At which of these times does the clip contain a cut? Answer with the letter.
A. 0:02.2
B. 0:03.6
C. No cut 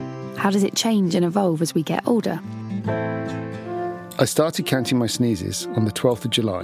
B